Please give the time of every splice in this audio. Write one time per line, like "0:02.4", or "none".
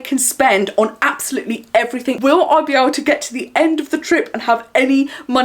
0:02.2